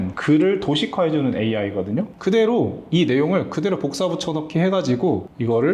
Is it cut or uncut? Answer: uncut